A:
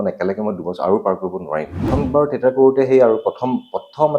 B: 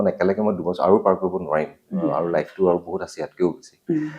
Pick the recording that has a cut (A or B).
A